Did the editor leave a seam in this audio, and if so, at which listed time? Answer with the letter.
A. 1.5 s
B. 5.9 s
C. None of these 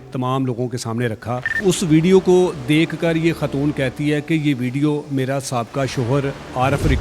A